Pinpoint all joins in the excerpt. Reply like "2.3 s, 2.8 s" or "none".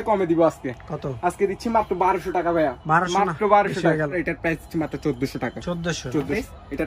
none